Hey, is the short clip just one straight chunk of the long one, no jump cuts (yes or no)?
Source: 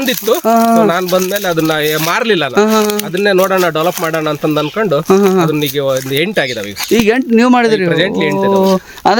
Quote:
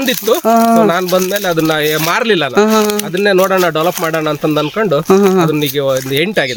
yes